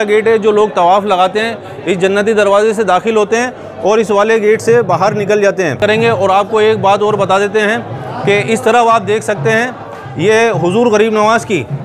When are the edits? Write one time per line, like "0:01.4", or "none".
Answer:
0:05.8